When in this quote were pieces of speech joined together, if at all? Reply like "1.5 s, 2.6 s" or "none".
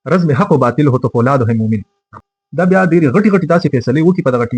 2.0 s